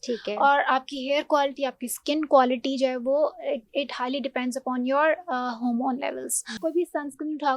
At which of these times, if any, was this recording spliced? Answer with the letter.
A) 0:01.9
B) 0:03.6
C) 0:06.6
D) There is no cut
C